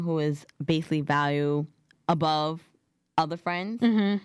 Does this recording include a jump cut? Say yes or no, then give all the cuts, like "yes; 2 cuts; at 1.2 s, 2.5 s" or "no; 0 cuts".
yes; 1 cut; at 1.9 s